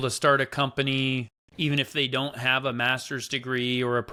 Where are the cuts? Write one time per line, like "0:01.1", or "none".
none